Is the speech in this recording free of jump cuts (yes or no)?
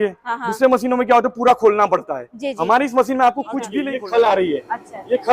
no